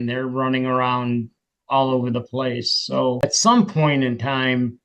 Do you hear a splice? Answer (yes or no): yes